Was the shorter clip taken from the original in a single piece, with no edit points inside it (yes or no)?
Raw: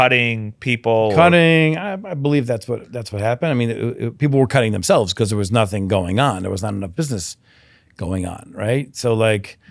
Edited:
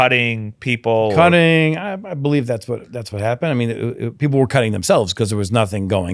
yes